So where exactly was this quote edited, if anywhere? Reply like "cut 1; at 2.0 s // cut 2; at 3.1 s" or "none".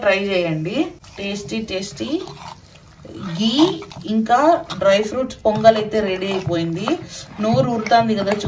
cut 1; at 1.0 s